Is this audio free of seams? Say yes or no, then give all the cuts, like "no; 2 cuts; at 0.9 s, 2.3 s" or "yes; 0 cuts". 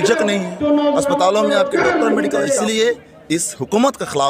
no; 1 cut; at 2.6 s